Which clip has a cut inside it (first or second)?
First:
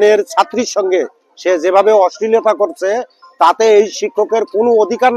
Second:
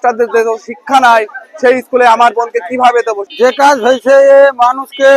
second